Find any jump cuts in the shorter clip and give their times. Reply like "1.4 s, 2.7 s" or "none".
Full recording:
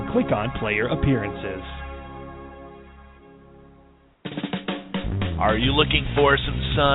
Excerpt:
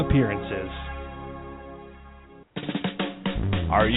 2.4 s